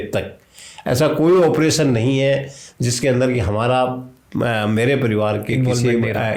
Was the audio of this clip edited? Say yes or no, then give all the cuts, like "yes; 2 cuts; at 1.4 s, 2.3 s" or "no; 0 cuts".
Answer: no; 0 cuts